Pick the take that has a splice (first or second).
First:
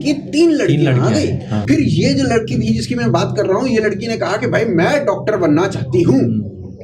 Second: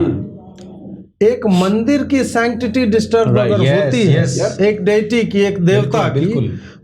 first